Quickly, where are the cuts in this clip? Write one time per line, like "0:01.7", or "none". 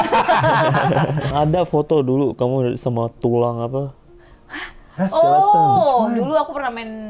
0:01.3